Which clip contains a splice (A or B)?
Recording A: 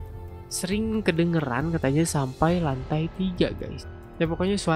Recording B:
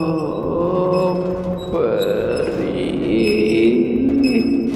A